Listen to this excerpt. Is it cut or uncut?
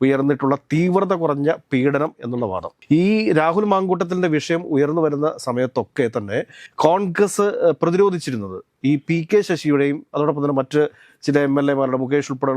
uncut